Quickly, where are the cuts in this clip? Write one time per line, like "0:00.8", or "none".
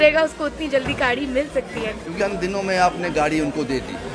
0:02.1